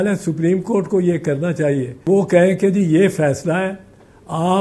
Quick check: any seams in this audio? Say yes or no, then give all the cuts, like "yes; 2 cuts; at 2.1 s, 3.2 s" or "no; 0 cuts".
yes; 1 cut; at 2.1 s